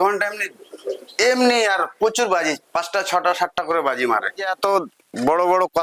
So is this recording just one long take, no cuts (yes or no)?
no